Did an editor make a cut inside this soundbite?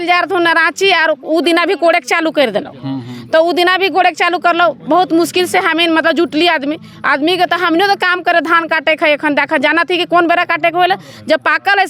no; 0 cuts

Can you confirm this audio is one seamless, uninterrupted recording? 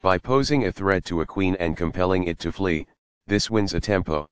no; 1 cut; at 1.1 s

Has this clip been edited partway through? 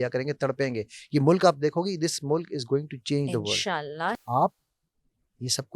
yes; 1 cut; at 4.2 s

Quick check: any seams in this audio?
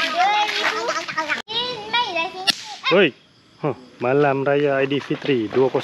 yes; 1 cut; at 1.5 s

